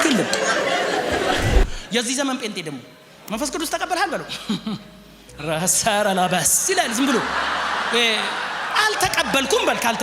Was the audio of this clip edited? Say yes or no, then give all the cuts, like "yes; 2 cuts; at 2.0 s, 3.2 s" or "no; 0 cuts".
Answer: yes; 1 cut; at 1.8 s